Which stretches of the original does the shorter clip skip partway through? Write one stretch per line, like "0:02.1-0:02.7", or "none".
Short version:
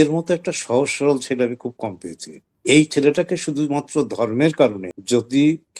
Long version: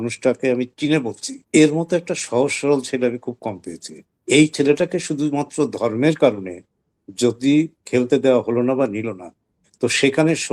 0:06.5-0:07.0